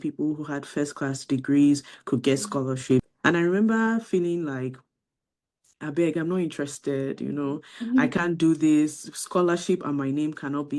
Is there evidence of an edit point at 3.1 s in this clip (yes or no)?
yes